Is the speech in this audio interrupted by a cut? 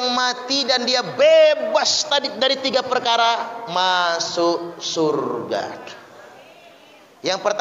no; 0 cuts

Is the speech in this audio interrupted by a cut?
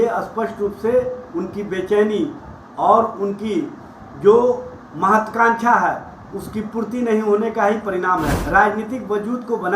yes; 1 cut; at 8.4 s

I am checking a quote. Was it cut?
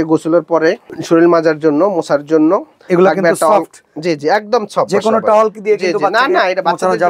yes; 2 cuts; at 0.9 s, 2.7 s

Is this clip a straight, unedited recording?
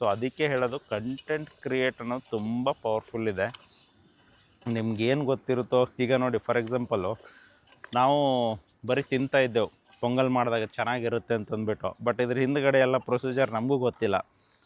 yes; 0 cuts

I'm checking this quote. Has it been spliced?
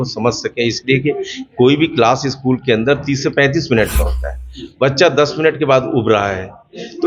no; 0 cuts

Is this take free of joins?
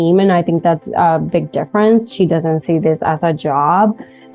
yes; 0 cuts

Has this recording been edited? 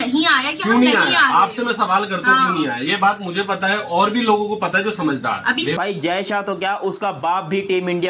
yes; 1 cut; at 5.7 s

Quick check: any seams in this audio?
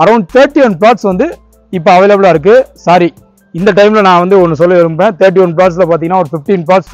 no; 0 cuts

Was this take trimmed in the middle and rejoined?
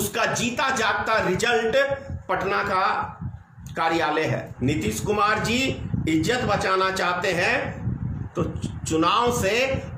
yes; 1 cut; at 4.5 s

